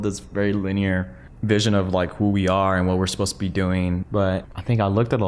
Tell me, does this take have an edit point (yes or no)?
yes